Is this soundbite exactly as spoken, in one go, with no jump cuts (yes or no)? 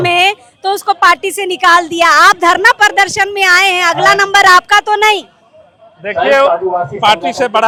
yes